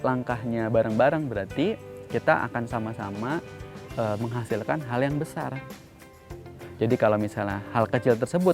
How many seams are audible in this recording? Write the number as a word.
one